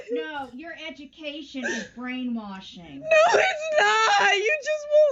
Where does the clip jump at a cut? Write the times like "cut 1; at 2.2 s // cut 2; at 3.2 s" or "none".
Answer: none